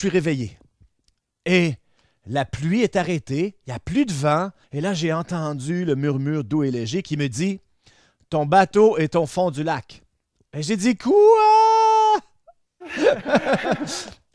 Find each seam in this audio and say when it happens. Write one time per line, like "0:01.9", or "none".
0:04.6